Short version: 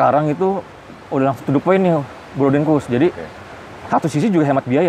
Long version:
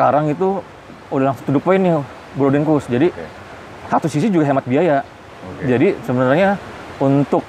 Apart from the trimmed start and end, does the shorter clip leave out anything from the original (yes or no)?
no